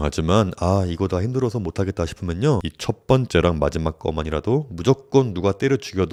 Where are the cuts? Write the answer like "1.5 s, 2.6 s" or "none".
none